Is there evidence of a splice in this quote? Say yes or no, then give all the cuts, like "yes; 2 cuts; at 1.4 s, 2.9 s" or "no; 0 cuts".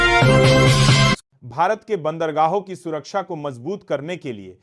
yes; 1 cut; at 1.3 s